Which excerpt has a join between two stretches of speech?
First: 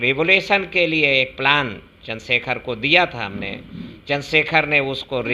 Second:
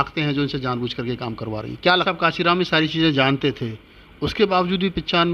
second; 1 cut; at 2.1 s

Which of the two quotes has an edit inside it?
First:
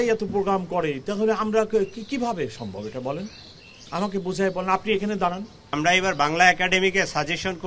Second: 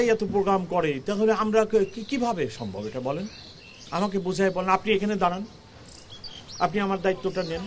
first; 1 cut; at 5.7 s

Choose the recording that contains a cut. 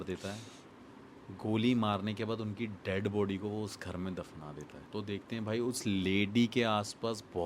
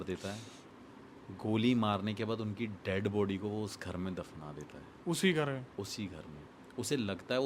first; 1 cut; at 4.7 s

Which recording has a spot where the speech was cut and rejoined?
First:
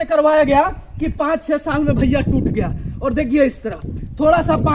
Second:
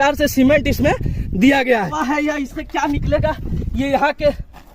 second; 1 cut; at 1.9 s

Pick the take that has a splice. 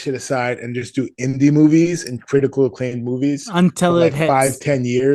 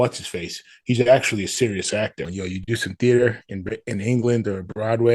second; 1 cut; at 2.3 s

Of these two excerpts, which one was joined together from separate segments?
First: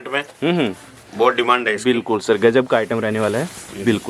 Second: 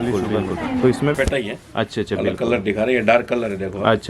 second; 1 cut; at 1.1 s

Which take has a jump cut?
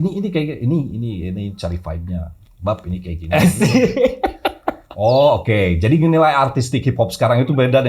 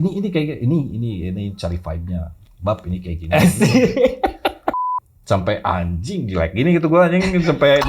second; 1 cut; at 4.9 s

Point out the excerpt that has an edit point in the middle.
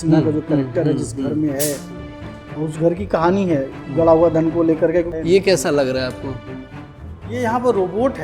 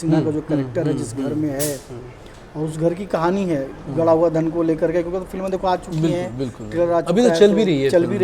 first; 1 cut; at 5.1 s

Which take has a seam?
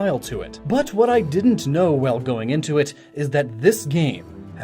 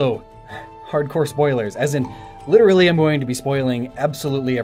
first; 1 cut; at 1.1 s

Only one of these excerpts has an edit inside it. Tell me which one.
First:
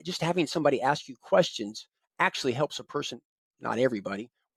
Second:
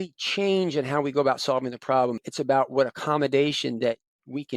second; 1 cut; at 2.2 s

